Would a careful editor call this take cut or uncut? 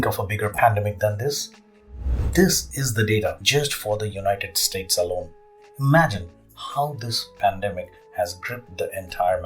cut